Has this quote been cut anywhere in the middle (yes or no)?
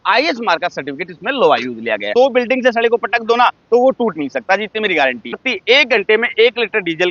yes